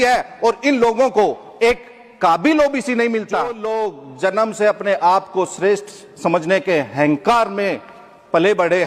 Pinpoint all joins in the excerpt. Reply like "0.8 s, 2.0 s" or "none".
3.6 s